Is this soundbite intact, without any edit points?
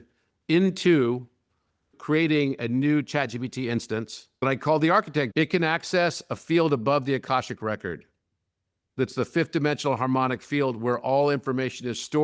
no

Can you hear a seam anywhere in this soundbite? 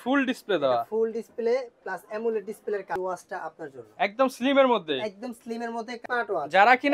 yes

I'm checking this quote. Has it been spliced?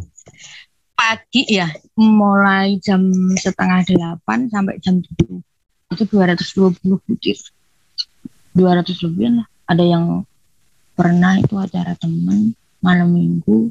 yes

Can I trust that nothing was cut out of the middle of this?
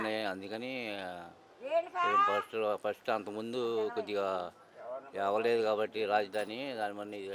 yes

